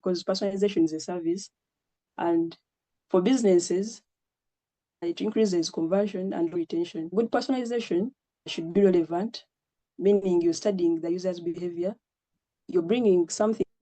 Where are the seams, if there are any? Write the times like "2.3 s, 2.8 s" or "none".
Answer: 7.0 s